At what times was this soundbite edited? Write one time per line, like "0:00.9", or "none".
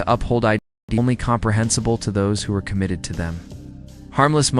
0:01.0